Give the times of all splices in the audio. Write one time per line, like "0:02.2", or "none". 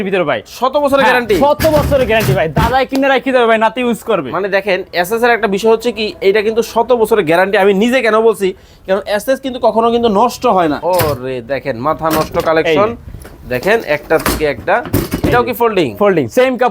0:10.8